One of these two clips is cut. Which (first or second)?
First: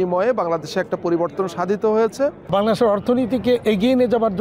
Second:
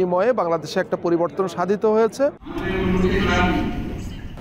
first